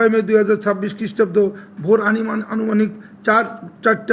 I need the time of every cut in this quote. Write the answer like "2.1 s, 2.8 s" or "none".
none